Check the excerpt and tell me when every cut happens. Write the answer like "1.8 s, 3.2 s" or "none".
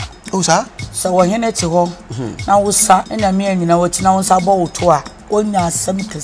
3.1 s

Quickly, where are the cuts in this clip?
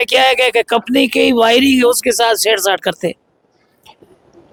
none

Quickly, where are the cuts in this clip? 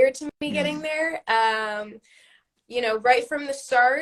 none

